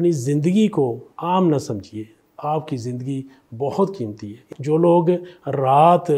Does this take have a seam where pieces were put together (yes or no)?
yes